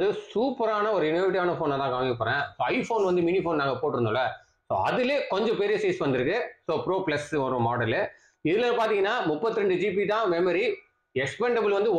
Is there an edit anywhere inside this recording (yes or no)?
no